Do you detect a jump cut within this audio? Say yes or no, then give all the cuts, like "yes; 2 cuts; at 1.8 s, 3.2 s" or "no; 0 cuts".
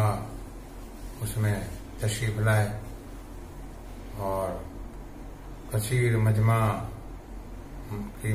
no; 0 cuts